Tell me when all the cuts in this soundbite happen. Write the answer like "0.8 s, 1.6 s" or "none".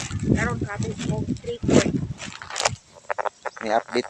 2.1 s